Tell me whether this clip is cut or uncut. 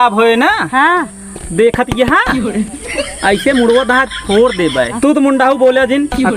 cut